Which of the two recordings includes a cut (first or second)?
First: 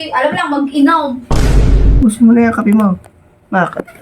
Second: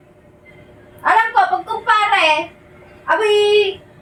first